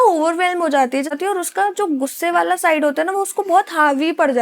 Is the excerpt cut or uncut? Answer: cut